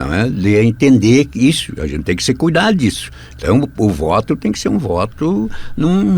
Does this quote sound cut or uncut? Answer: uncut